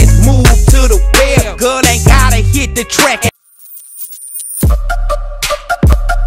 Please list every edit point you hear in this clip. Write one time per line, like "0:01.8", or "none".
0:03.4

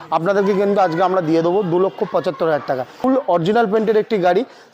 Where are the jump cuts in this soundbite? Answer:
0:03.0

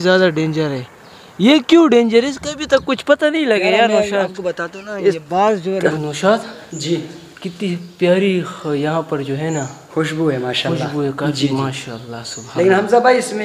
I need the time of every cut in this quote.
0:05.9

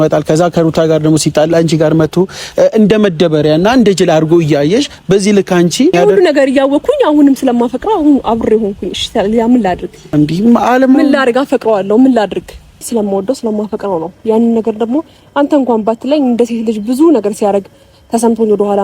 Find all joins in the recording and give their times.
0:05.9
0:09.9
0:12.8

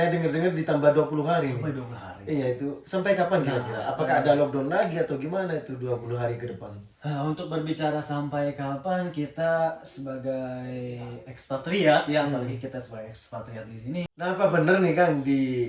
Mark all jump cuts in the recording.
0:14.1

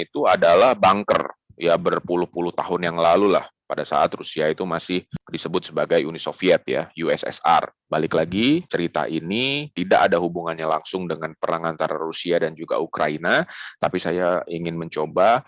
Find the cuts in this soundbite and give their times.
0:07.8

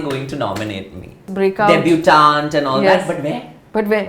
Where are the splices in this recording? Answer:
0:01.2

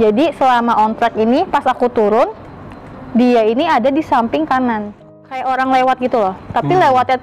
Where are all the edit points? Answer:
0:05.4

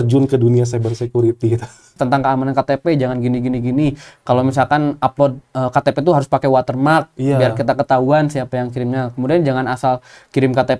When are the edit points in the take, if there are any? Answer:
0:02.0

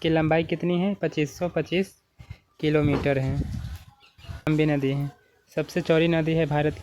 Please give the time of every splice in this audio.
0:04.5

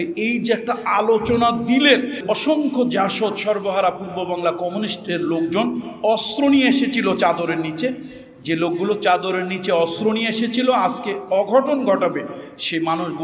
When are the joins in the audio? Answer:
0:02.2

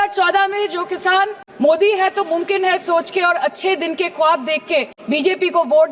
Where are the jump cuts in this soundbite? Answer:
0:01.4
0:05.0

